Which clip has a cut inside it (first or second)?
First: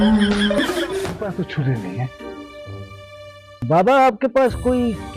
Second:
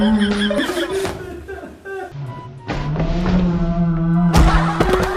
first